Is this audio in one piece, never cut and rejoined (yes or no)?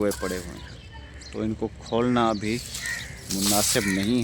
yes